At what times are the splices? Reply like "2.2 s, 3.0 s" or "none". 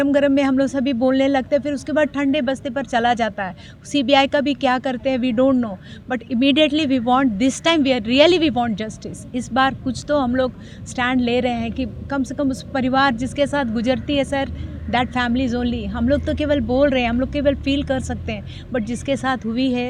none